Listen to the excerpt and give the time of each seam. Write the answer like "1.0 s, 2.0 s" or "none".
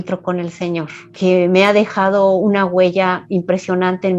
1.1 s